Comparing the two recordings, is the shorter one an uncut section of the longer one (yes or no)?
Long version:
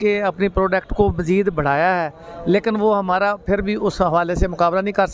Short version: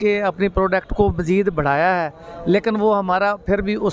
yes